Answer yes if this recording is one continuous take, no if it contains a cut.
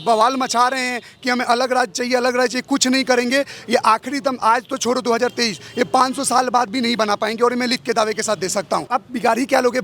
no